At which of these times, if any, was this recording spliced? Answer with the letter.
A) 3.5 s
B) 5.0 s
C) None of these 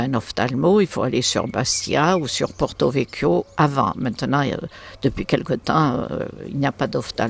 C